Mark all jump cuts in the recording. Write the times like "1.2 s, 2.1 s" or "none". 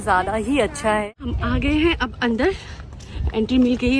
1.1 s